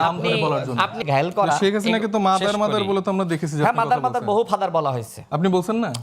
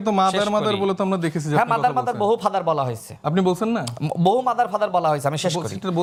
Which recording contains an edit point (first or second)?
first